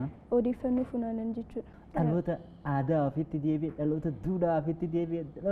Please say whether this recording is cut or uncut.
cut